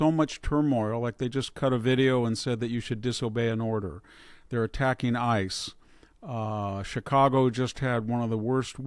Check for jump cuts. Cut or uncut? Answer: uncut